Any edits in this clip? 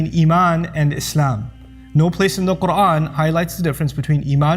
yes; 1 cut; at 3.1 s

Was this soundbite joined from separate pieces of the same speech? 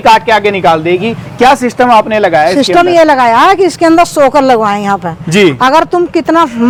no; 0 cuts

